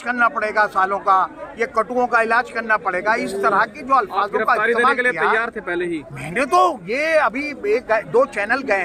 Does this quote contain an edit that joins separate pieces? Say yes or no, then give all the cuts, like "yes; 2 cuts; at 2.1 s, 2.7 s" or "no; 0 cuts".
no; 0 cuts